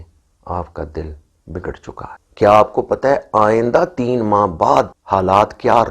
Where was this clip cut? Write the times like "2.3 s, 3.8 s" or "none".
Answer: 2.2 s, 5.0 s